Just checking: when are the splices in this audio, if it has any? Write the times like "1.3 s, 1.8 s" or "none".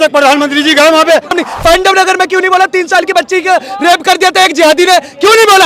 1.3 s